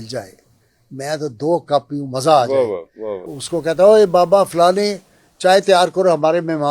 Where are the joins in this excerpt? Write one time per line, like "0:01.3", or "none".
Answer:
0:03.3